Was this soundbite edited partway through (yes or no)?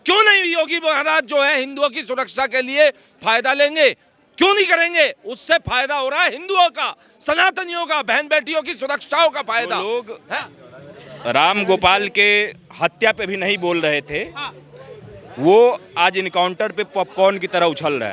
yes